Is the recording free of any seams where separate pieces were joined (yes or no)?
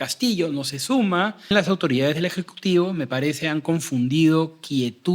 no